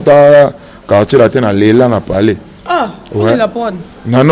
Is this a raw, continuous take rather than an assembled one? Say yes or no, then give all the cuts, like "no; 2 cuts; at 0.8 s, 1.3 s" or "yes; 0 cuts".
yes; 0 cuts